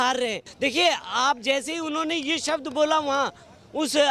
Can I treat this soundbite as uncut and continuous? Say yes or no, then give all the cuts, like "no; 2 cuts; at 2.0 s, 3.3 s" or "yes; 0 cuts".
yes; 0 cuts